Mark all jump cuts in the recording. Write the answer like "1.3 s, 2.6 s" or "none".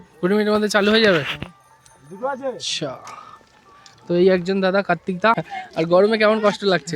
5.6 s